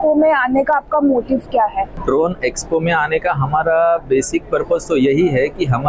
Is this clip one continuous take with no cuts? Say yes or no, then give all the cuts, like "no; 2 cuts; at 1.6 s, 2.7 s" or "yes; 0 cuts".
no; 1 cut; at 1.9 s